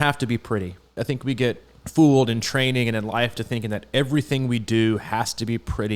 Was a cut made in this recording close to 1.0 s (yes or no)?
yes